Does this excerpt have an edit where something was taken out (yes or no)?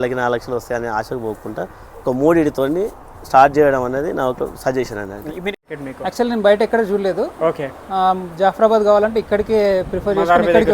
yes